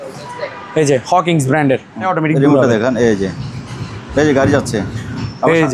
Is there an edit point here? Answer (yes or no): yes